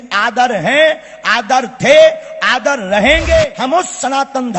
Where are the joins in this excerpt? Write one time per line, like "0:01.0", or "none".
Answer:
0:03.5